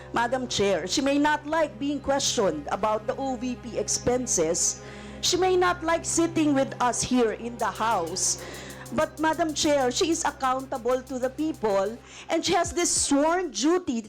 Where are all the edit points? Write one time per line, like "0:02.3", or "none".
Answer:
none